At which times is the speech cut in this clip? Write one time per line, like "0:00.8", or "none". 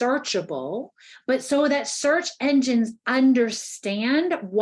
none